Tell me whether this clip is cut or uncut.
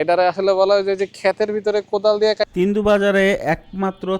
cut